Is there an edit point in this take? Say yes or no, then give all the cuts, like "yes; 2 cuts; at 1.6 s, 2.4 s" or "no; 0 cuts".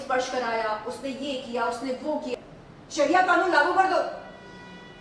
yes; 1 cut; at 2.3 s